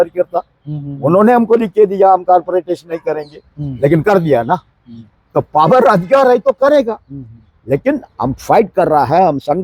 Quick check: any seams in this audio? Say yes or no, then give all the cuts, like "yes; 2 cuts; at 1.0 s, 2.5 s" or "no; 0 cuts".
no; 0 cuts